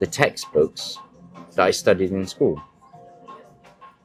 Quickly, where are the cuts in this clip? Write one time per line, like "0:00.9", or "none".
none